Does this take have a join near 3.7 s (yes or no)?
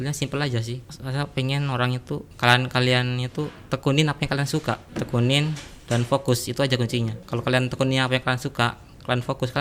no